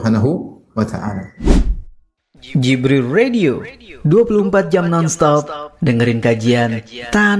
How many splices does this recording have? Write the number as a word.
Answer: one